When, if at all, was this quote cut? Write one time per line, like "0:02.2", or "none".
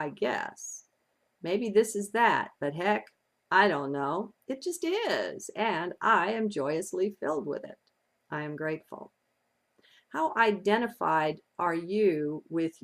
0:11.2